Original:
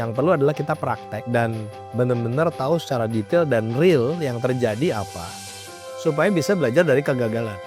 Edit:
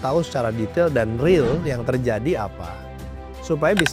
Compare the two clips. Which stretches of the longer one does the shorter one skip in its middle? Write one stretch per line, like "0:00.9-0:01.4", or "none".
none